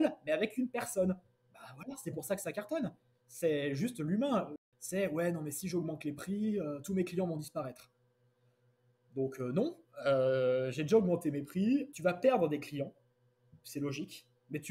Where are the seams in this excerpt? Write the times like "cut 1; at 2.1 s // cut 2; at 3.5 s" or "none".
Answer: cut 1; at 4.6 s // cut 2; at 11.9 s